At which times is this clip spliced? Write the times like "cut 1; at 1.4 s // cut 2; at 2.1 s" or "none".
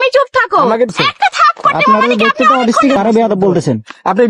cut 1; at 1.0 s // cut 2; at 3.0 s